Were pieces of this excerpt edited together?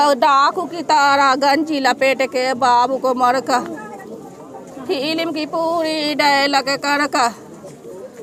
no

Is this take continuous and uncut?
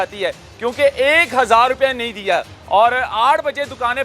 no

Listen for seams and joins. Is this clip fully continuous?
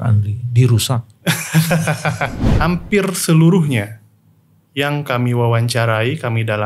no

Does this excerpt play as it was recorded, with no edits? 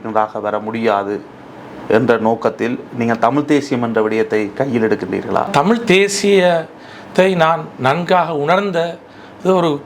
no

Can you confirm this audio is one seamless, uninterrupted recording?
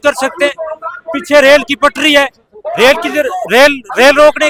yes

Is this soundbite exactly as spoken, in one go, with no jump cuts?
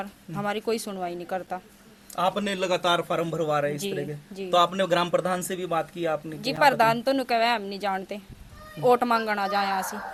yes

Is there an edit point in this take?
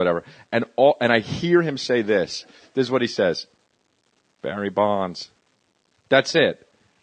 no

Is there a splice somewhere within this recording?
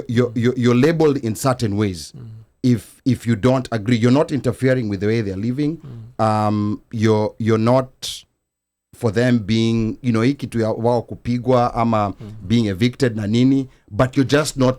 no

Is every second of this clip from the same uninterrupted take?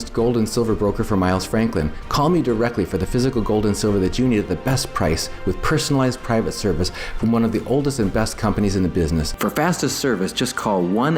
no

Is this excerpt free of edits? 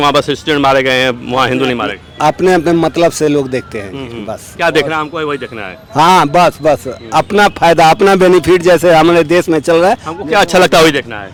yes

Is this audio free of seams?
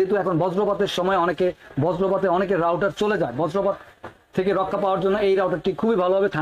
yes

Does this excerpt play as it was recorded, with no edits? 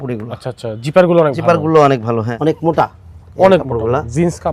no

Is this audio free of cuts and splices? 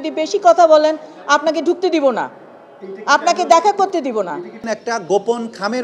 no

